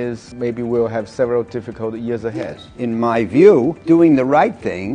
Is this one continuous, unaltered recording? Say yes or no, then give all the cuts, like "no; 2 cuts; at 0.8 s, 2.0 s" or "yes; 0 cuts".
no; 2 cuts; at 2.4 s, 3.8 s